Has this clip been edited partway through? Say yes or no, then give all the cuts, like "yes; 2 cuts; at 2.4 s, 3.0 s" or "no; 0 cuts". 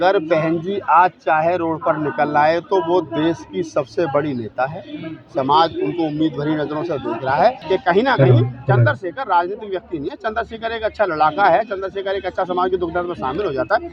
yes; 1 cut; at 7.6 s